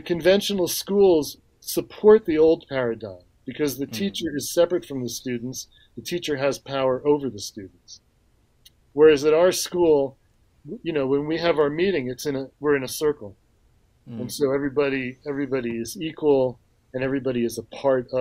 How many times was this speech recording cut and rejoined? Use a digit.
2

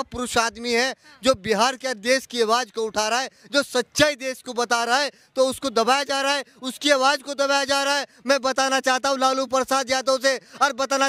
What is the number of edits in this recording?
0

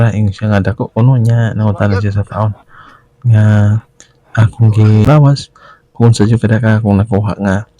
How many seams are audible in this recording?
1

